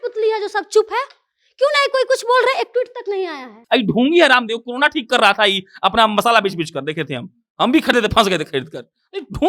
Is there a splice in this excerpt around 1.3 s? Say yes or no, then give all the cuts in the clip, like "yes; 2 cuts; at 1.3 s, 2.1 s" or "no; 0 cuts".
no; 1 cut; at 3.5 s